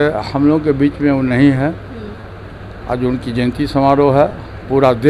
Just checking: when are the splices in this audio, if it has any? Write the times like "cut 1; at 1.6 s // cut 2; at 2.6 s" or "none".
none